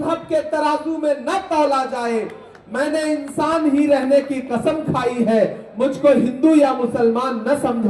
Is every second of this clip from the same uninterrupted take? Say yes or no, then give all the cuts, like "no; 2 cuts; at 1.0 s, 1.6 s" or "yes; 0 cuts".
yes; 0 cuts